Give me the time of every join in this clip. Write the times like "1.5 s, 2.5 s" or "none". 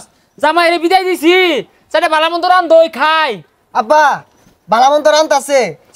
none